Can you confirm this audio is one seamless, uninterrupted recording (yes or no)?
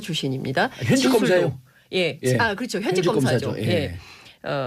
no